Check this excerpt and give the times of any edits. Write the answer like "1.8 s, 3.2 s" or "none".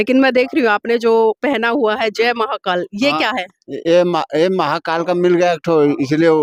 none